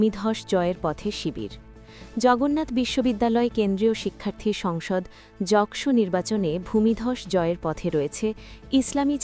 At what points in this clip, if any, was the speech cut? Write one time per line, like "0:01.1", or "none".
none